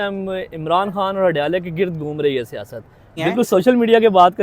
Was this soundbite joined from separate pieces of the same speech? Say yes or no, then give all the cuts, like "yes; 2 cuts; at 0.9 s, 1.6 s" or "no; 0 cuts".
yes; 1 cut; at 3.1 s